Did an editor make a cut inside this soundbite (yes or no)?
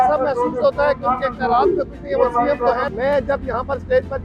yes